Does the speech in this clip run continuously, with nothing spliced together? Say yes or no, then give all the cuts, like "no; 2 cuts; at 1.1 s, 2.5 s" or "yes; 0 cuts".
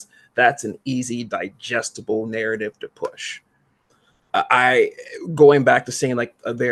yes; 0 cuts